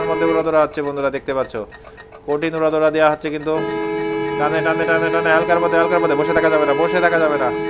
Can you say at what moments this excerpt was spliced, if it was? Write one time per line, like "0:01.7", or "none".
none